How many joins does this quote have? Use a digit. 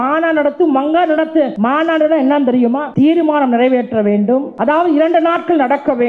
3